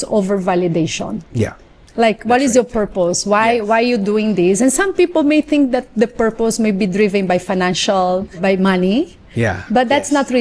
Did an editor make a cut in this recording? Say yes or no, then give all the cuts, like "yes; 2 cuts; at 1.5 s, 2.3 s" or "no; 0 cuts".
yes; 1 cut; at 8.3 s